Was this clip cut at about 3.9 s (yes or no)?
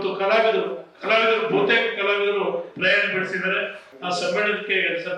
yes